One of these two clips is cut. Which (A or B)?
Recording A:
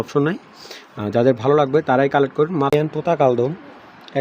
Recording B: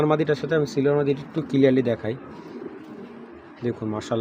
A